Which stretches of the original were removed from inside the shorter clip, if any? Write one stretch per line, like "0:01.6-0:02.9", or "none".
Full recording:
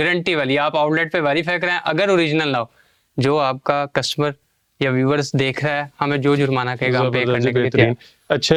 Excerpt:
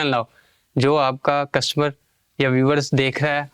none